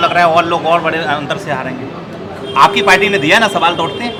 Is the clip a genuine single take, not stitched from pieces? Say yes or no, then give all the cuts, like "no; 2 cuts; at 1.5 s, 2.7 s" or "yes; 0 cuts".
yes; 0 cuts